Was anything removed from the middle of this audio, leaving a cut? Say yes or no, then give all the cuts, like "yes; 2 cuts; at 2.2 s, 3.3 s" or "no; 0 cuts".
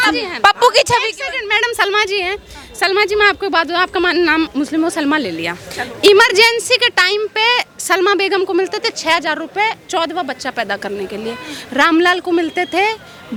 no; 0 cuts